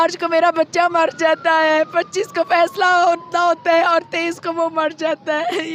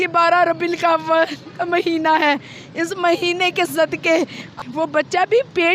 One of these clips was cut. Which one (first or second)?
second